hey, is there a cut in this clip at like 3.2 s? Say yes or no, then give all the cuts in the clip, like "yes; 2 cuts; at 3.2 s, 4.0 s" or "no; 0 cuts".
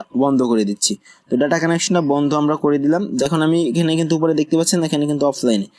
yes; 1 cut; at 3.2 s